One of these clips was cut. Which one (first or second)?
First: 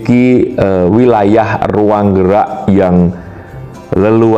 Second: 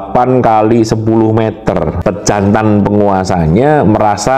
second